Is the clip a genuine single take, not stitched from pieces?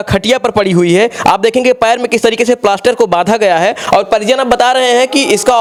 yes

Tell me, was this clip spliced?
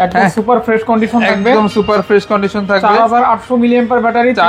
no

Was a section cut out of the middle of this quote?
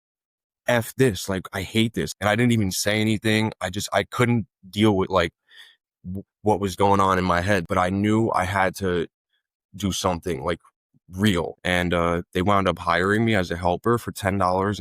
yes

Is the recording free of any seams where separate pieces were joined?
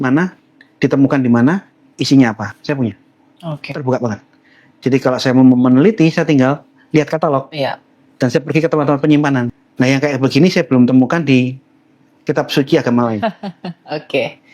no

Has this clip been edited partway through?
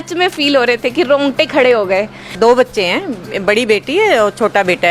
yes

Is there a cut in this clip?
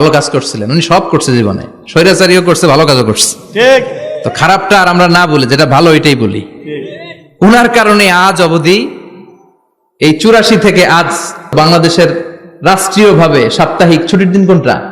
yes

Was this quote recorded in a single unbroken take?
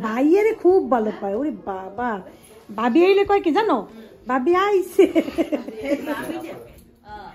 yes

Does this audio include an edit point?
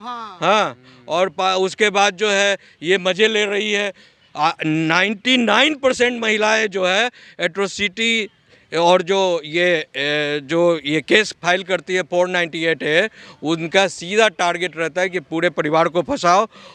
no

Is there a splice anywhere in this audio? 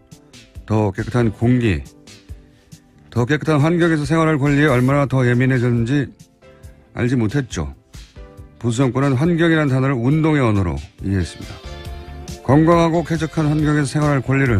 yes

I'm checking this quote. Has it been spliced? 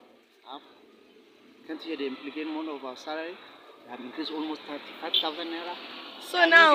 no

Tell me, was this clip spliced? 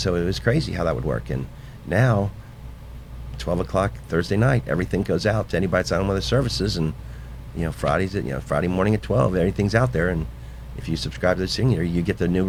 no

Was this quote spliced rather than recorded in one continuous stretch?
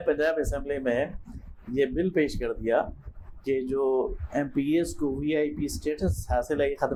no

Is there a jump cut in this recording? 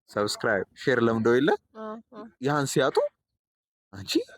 no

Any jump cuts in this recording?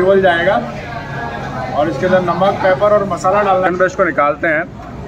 yes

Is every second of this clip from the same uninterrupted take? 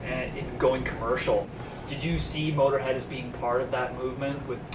no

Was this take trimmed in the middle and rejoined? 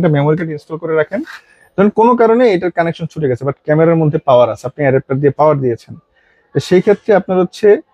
no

